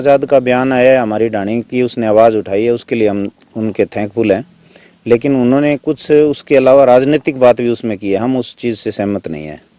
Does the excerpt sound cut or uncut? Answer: uncut